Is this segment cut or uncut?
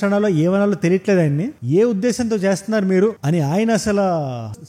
cut